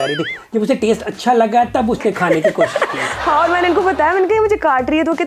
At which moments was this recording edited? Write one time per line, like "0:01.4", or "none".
none